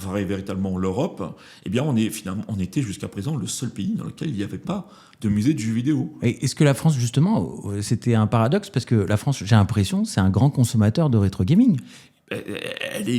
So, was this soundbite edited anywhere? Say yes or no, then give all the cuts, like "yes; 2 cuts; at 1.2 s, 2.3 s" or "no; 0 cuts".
no; 0 cuts